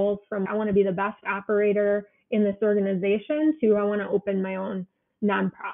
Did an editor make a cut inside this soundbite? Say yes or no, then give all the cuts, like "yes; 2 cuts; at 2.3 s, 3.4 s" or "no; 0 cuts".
no; 0 cuts